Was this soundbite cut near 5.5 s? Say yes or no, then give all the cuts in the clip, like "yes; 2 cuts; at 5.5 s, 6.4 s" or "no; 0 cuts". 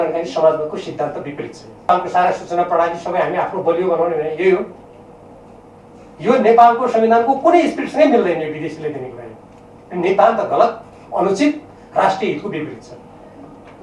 no; 1 cut; at 1.9 s